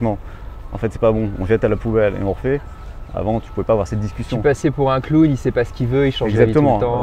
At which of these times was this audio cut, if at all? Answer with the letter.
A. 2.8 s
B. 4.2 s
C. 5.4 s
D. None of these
D